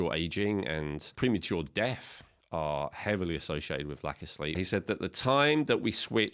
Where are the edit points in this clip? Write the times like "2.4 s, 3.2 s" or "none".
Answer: 1.1 s, 4.6 s

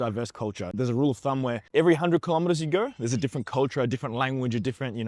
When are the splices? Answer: none

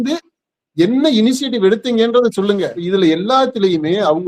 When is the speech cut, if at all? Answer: 2.7 s

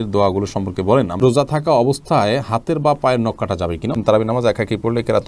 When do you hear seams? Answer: 1.2 s, 4.0 s

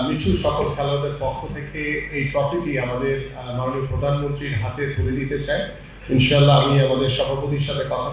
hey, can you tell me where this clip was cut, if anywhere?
none

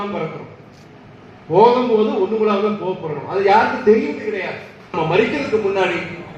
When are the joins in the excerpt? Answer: 4.9 s

